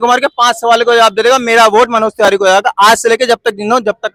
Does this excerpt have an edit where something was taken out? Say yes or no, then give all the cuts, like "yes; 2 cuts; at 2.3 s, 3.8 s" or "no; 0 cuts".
no; 0 cuts